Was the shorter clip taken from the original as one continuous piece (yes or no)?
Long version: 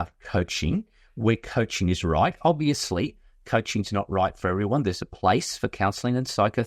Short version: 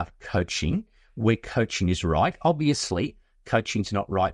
yes